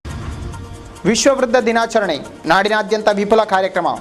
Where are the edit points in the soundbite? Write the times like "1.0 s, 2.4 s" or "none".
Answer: 0.9 s